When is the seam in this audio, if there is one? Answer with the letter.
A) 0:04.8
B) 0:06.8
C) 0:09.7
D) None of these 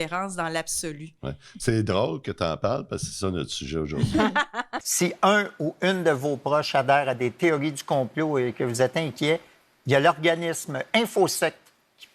A